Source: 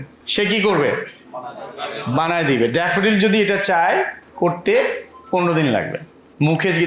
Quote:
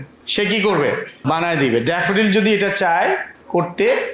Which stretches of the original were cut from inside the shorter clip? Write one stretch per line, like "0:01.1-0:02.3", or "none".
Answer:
0:01.1-0:02.0